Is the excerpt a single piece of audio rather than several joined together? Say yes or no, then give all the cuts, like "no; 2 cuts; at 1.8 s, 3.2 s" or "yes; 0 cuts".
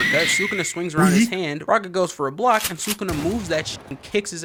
yes; 0 cuts